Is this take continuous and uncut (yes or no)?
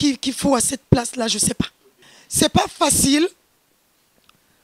no